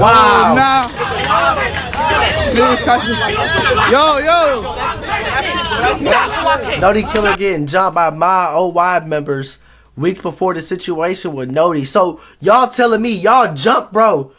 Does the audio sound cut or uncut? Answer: uncut